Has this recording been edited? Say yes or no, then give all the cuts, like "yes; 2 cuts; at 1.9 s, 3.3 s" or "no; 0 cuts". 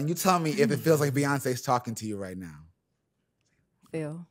no; 0 cuts